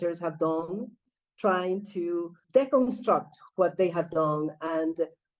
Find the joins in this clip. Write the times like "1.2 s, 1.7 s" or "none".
none